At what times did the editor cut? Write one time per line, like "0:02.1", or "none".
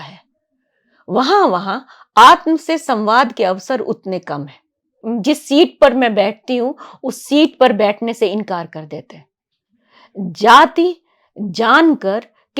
0:05.0